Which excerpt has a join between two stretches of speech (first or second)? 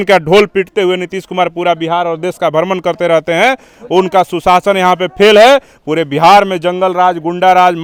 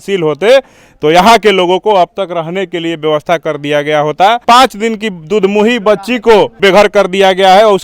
second